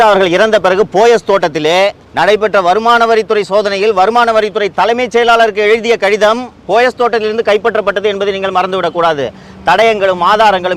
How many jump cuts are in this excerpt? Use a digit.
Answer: 1